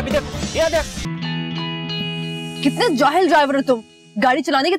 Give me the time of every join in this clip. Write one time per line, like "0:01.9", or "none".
0:01.0